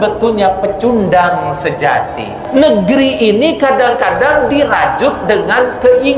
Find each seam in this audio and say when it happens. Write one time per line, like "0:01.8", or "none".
0:02.4